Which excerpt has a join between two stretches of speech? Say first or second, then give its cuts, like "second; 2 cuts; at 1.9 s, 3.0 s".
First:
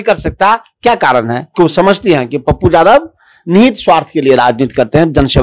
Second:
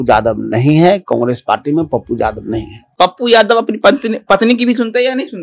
second; 1 cut; at 2.8 s